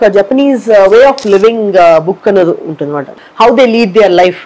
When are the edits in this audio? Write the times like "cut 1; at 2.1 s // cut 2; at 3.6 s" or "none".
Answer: cut 1; at 3.1 s